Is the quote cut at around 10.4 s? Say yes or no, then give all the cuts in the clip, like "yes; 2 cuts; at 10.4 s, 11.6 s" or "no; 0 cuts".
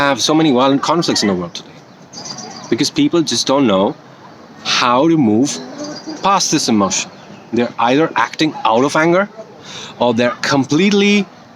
yes; 1 cut; at 10.4 s